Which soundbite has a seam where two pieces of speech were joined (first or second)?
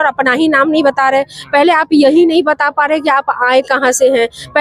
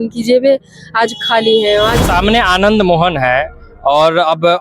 second